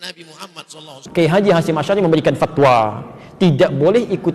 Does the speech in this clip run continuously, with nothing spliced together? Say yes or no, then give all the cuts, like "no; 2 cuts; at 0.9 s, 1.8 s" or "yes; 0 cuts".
no; 1 cut; at 1.0 s